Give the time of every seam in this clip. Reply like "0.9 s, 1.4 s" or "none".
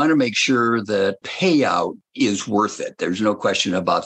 1.3 s, 2.0 s